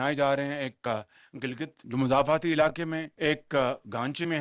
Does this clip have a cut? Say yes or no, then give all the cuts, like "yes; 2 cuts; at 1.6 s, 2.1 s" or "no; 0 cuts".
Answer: yes; 2 cuts; at 1.8 s, 3.1 s